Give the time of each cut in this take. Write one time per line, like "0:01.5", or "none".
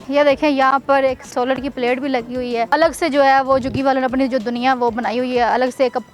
0:02.7